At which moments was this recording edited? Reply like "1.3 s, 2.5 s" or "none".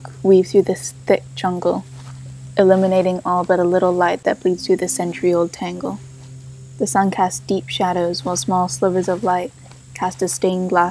none